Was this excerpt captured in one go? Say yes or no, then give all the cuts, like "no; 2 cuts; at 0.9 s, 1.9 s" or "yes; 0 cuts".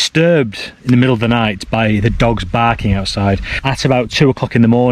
no; 1 cut; at 3.5 s